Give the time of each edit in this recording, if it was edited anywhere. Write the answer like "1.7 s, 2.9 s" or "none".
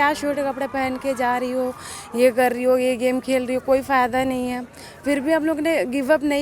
none